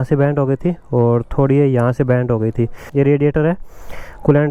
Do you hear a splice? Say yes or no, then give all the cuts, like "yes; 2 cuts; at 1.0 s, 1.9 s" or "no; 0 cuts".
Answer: yes; 1 cut; at 2.8 s